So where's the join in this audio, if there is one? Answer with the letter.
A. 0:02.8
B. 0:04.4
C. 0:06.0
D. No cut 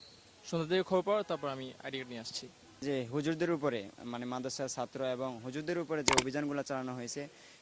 A